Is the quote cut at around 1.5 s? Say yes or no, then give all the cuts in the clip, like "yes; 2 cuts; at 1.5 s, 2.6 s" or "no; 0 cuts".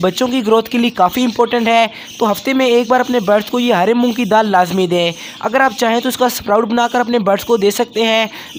no; 0 cuts